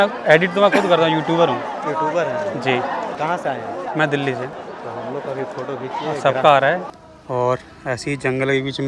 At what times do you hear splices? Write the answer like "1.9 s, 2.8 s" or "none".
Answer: 3.1 s, 4.6 s, 7.0 s